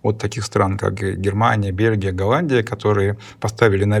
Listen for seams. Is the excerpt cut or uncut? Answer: uncut